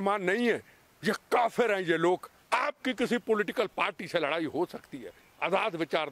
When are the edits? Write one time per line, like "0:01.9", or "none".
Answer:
none

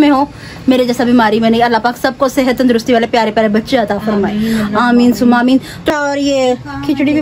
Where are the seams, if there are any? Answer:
0:05.9

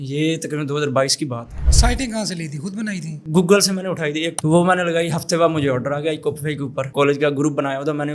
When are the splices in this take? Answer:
0:01.8
0:04.3
0:06.9

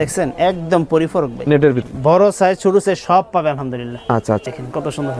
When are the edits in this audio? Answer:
0:01.8
0:04.4

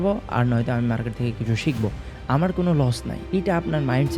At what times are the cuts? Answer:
0:03.1

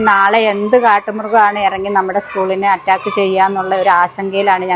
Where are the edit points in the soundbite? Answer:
none

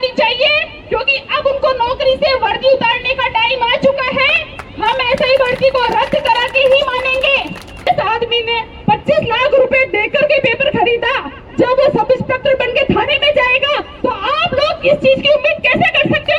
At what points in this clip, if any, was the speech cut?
0:07.9

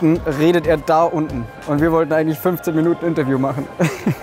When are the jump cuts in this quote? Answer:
none

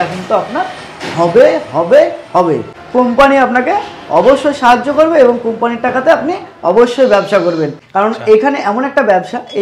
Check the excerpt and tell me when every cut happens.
0:02.8
0:07.8

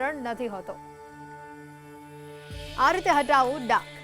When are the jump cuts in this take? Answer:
0:00.8
0:02.4

